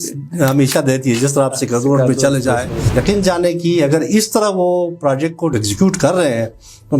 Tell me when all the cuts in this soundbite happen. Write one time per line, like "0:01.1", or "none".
0:02.8